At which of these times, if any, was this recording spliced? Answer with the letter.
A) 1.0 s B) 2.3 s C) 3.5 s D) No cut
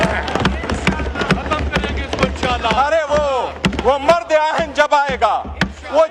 D